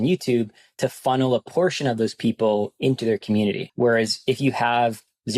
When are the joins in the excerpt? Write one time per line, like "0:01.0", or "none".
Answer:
0:03.7